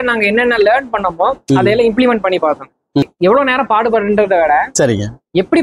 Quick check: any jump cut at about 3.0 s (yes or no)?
yes